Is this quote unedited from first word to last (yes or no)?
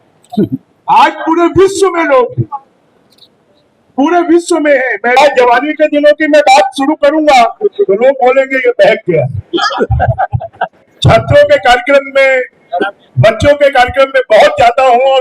no